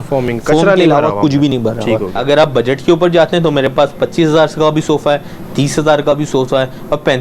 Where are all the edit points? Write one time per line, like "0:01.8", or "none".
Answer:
0:02.1